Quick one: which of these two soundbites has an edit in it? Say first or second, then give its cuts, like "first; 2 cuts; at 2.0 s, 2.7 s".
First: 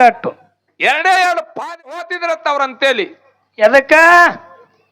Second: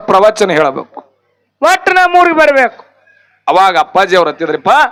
first; 1 cut; at 2.0 s